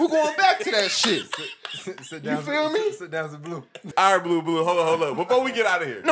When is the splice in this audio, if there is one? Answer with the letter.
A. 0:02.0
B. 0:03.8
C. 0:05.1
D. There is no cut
B